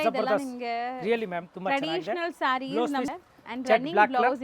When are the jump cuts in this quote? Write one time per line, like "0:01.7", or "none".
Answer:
0:03.1